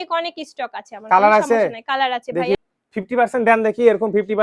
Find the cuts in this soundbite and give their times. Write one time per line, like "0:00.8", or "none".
0:02.6